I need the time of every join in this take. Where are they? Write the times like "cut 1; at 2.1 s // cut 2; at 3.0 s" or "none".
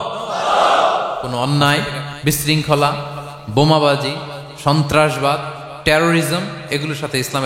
cut 1; at 1.3 s // cut 2; at 2.1 s